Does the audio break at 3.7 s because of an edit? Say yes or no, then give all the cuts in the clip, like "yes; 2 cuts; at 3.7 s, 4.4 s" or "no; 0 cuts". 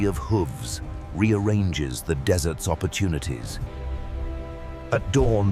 yes; 1 cut; at 3.7 s